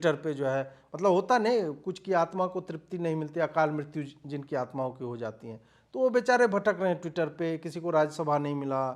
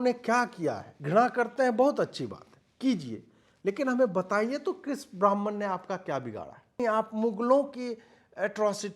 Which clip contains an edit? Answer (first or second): second